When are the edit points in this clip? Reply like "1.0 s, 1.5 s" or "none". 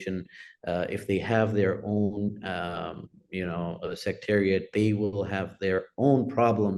none